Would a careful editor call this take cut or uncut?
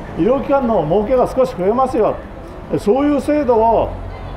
uncut